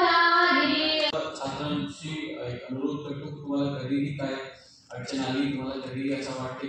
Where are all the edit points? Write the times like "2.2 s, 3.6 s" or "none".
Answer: 1.1 s